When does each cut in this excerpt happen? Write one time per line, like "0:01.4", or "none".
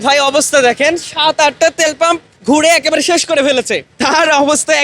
0:02.3
0:03.8